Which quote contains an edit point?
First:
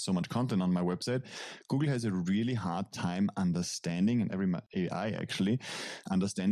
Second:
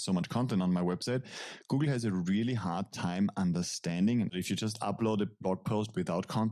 second; 1 cut; at 4.3 s

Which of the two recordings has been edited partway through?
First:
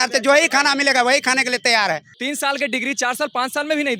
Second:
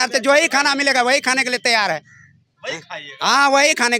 first; 1 cut; at 2.1 s

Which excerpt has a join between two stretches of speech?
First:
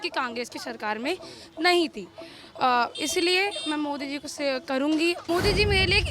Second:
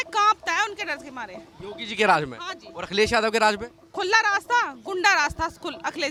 first; 1 cut; at 5.2 s

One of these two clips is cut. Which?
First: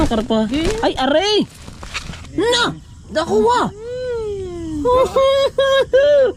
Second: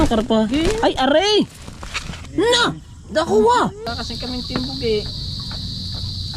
second; 1 cut; at 3.8 s

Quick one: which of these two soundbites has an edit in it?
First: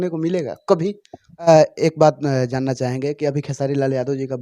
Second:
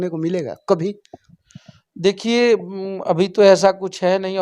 first; 1 cut; at 1.5 s

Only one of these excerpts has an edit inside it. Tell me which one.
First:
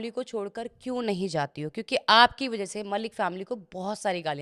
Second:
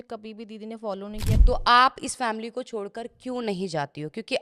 second; 1 cut; at 1.4 s

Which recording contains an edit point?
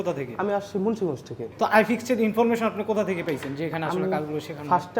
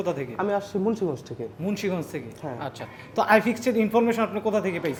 first; 1 cut; at 1.4 s

